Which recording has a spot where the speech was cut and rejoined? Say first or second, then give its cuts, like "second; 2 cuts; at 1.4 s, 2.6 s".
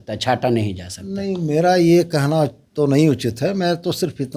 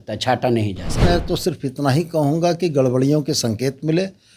second; 1 cut; at 1.0 s